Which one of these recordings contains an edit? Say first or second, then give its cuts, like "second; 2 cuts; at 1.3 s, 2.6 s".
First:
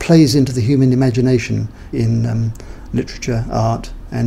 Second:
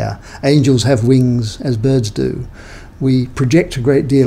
first; 1 cut; at 1.9 s